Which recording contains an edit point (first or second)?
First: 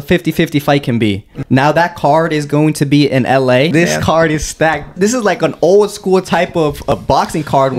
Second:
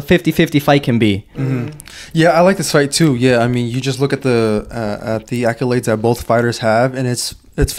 first